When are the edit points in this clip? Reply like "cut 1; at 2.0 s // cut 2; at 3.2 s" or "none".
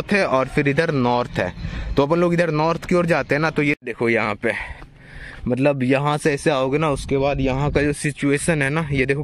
cut 1; at 3.8 s